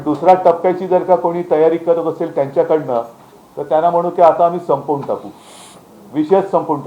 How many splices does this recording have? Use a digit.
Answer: 0